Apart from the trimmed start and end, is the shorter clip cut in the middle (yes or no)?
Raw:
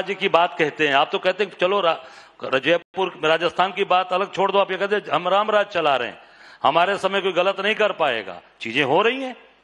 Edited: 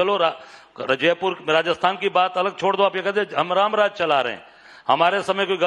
yes